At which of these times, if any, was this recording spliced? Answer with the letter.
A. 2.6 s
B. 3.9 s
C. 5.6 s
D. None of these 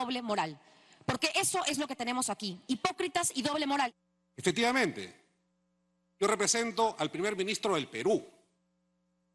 B